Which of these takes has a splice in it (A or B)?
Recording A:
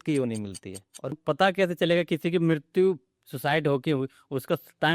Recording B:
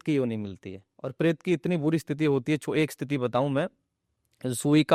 A